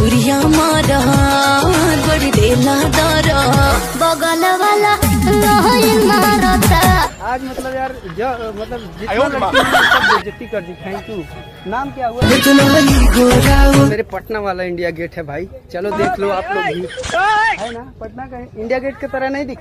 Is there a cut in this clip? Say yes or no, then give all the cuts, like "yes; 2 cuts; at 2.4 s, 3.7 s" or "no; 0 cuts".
yes; 3 cuts; at 3.7 s, 7.1 s, 13.9 s